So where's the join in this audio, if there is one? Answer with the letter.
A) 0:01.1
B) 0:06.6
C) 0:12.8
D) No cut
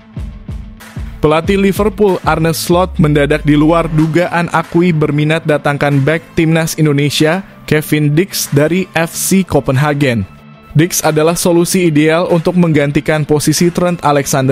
A